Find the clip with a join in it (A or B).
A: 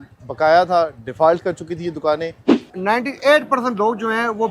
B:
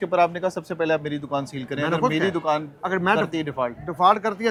A